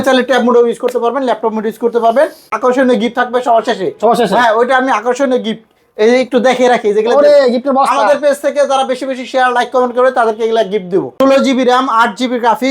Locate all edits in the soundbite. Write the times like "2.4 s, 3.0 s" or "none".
2.5 s, 11.1 s